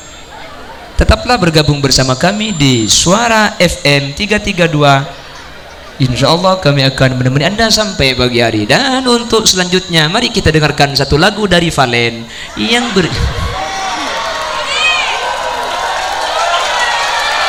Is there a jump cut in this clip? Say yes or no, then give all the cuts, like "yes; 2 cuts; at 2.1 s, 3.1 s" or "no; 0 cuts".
no; 0 cuts